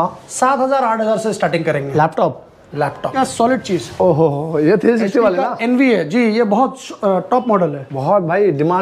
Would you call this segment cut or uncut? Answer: cut